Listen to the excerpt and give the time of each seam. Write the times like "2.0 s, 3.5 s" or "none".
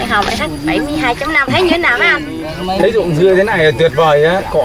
1.4 s